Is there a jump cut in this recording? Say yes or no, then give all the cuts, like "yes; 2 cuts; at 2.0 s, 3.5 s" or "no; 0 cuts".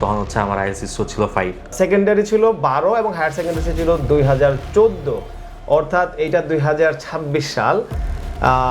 yes; 1 cut; at 1.7 s